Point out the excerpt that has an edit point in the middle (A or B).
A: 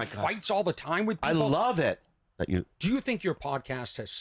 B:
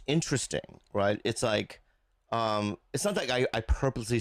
A